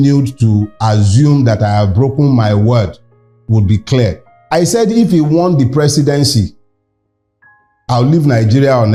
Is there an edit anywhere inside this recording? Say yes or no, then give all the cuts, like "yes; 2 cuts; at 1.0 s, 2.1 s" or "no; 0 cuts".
no; 0 cuts